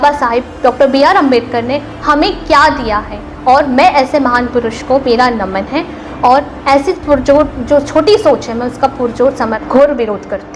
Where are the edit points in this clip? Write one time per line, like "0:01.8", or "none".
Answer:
0:09.6